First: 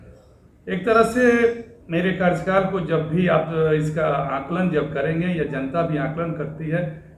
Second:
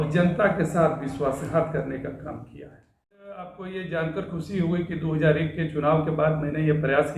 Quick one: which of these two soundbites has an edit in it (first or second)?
second